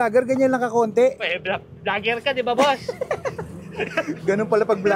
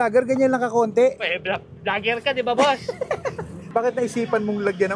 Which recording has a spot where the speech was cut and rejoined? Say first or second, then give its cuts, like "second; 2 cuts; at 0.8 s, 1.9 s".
second; 1 cut; at 3.7 s